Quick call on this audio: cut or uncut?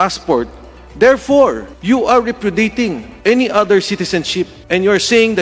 cut